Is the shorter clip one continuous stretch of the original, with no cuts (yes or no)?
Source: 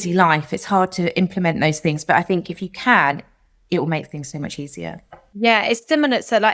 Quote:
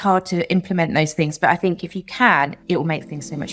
no